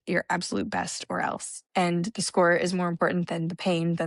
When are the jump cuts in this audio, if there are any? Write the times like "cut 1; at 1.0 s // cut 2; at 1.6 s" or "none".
none

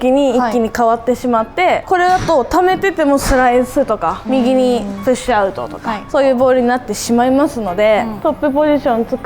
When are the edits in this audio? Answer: cut 1; at 1.8 s // cut 2; at 4.2 s // cut 3; at 5.9 s // cut 4; at 8.1 s

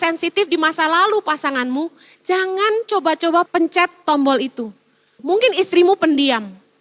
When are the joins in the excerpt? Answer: cut 1; at 3.5 s // cut 2; at 5.2 s

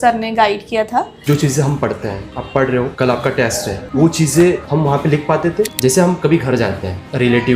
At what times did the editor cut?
cut 1; at 1.1 s // cut 2; at 5.7 s

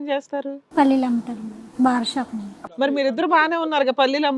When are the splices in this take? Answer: cut 1; at 2.6 s

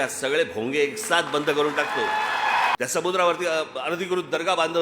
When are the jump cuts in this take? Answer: cut 1; at 2.8 s

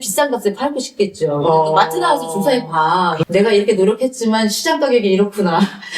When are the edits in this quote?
cut 1; at 3.2 s

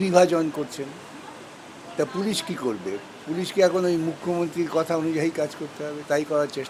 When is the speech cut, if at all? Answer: none

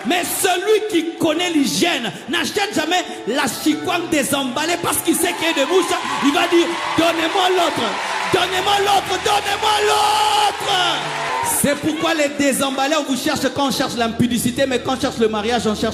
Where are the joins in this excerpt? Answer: cut 1; at 11.3 s

